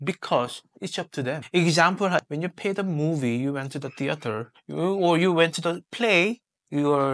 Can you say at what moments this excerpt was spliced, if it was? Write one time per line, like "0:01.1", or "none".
0:01.4
0:02.2